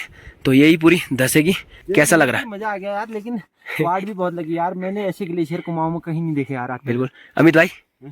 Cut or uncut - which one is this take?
cut